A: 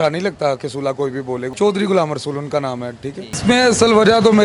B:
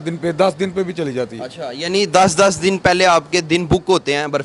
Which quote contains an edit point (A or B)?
A